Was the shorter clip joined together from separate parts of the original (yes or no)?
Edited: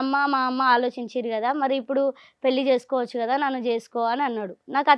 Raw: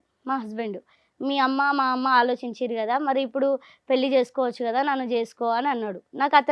no